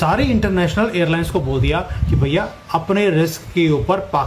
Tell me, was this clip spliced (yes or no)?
no